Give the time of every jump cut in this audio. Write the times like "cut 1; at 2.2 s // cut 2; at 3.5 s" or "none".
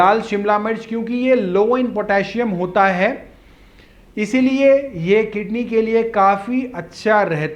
none